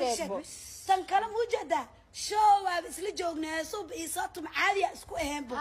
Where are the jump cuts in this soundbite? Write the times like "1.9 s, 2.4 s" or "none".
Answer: 4.7 s